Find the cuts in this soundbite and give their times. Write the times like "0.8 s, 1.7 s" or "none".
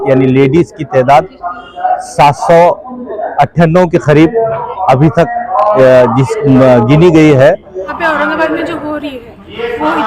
7.9 s